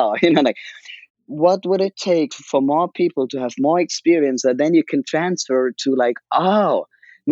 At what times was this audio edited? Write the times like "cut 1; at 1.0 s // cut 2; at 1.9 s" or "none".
cut 1; at 1.1 s // cut 2; at 2.4 s